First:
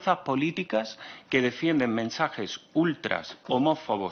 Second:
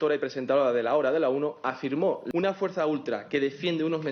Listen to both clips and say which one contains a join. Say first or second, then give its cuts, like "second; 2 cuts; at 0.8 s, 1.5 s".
second; 1 cut; at 2.2 s